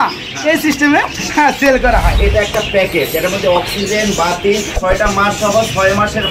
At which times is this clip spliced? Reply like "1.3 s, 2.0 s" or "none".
2.2 s, 4.7 s